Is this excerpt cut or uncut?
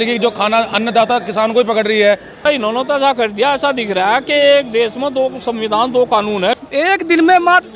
cut